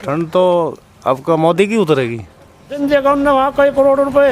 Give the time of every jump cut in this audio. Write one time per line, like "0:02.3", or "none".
0:02.8